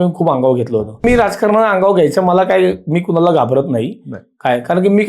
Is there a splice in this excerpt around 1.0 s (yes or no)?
yes